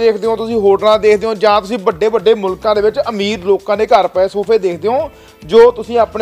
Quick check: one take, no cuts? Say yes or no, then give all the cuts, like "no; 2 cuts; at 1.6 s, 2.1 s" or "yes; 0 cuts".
yes; 0 cuts